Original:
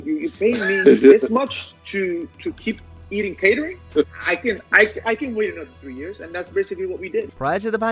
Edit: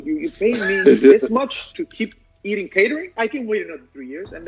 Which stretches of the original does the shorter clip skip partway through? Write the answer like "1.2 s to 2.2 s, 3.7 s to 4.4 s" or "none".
1.7 s to 2.4 s, 3.8 s to 5.0 s